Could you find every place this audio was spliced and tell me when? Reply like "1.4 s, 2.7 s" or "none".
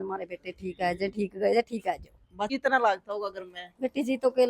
2.5 s